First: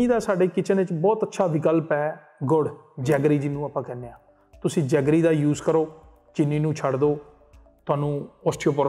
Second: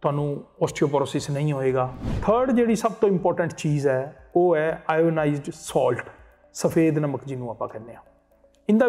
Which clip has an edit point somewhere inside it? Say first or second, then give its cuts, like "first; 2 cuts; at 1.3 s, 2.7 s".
second; 1 cut; at 2.0 s